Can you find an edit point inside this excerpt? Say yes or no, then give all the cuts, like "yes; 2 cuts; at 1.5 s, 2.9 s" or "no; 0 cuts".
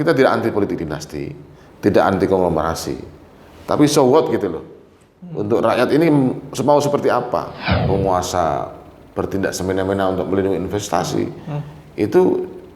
yes; 1 cut; at 7.8 s